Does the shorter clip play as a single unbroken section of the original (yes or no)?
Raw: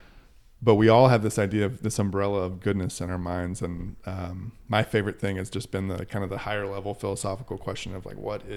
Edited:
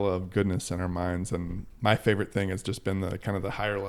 no